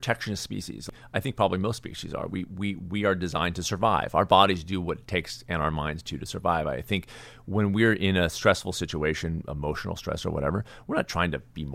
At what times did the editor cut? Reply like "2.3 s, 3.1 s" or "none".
0.9 s